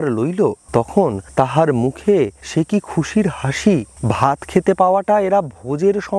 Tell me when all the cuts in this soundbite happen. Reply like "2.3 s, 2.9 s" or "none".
1.1 s, 2.4 s, 3.9 s